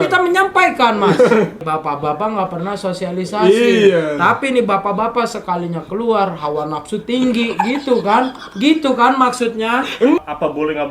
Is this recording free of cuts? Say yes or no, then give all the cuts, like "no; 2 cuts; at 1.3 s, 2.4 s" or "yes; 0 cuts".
no; 2 cuts; at 1.7 s, 10.2 s